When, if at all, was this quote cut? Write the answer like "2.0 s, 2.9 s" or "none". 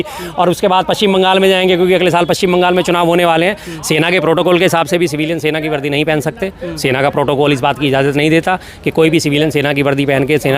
3.7 s